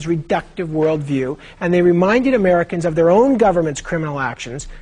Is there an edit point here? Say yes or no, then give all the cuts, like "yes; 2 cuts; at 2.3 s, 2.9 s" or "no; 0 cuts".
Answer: yes; 1 cut; at 1.1 s